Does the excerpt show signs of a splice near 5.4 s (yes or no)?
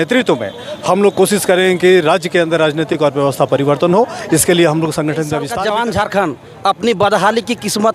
yes